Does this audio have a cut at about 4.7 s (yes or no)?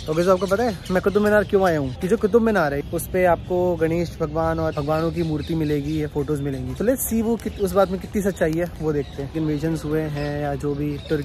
yes